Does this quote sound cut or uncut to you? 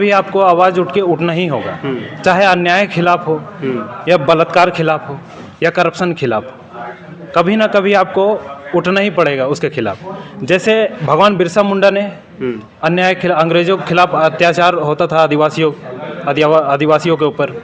uncut